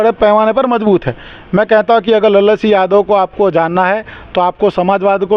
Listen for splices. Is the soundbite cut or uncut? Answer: uncut